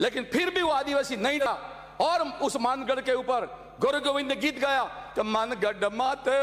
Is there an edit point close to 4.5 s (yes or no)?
no